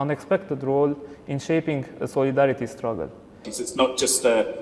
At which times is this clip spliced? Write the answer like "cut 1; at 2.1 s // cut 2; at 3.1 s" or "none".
cut 1; at 3.5 s